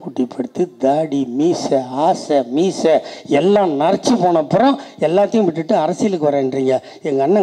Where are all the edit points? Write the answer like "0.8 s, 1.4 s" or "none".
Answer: none

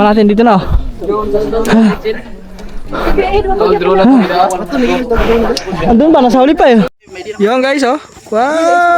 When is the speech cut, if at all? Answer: 6.9 s

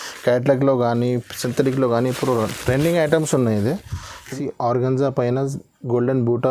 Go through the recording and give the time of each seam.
4.3 s

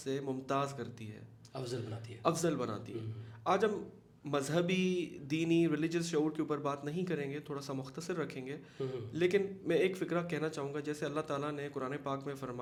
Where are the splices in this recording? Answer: none

